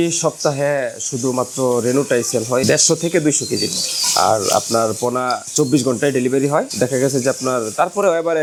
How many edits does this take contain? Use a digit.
0